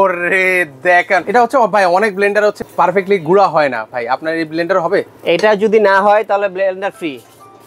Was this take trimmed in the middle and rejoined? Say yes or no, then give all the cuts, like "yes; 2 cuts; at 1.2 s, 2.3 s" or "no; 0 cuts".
yes; 2 cuts; at 1.3 s, 2.6 s